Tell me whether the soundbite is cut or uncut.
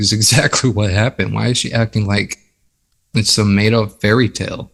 uncut